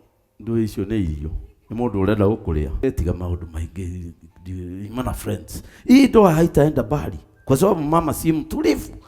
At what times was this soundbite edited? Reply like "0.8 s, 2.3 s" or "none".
2.8 s